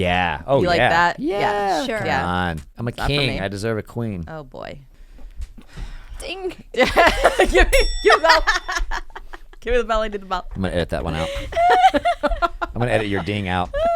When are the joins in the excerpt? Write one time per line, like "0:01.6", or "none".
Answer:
0:02.7
0:04.9